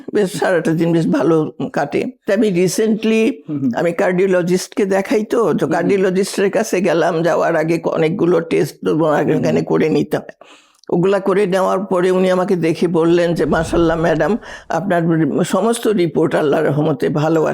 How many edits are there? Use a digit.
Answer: 1